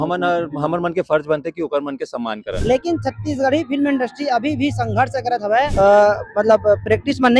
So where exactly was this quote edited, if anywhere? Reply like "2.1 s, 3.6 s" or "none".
2.5 s, 5.7 s

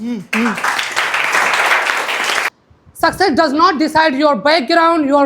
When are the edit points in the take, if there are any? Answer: 2.5 s

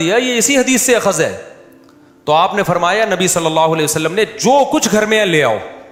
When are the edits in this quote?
none

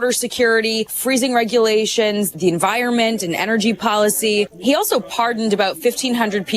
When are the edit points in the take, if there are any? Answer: 1.0 s, 2.3 s, 4.5 s

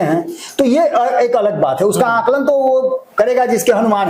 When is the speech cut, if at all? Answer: none

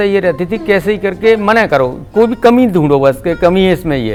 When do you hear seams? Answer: none

